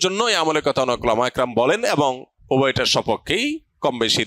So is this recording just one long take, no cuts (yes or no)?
no